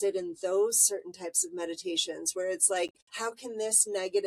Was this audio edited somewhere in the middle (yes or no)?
yes